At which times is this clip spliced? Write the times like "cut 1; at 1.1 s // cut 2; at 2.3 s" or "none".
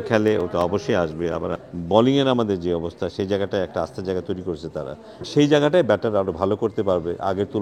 cut 1; at 1.6 s // cut 2; at 5.2 s